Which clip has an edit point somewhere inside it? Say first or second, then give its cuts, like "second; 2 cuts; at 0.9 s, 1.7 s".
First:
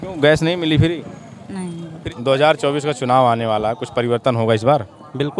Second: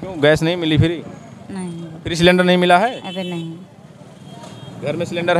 first; 1 cut; at 2.1 s